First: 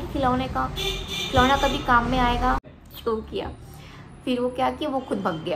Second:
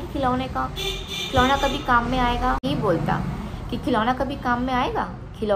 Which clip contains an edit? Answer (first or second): first